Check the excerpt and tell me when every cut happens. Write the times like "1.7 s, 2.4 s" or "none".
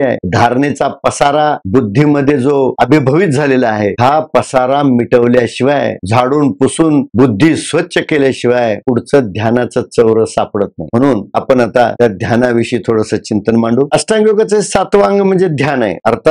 none